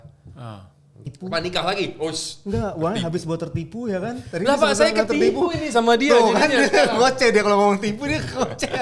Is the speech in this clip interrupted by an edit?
yes; 1 cut; at 1.1 s

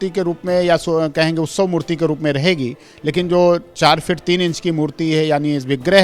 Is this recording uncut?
yes; 0 cuts

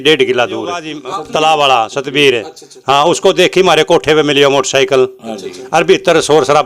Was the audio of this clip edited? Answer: yes; 1 cut; at 0.9 s

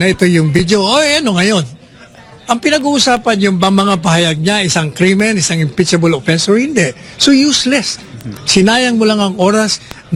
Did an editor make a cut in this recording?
no; 0 cuts

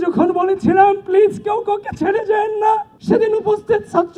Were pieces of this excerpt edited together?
yes; 1 cut; at 2.9 s

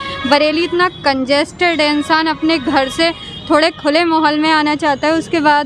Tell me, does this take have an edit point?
no; 0 cuts

